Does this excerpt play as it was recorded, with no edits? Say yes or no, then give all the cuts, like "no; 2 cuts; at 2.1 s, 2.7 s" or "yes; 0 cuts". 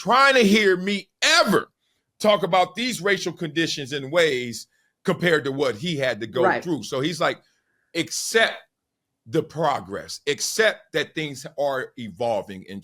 yes; 0 cuts